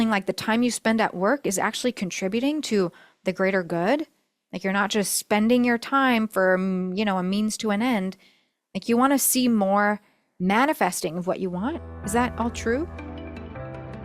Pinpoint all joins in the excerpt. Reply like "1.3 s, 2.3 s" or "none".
12.9 s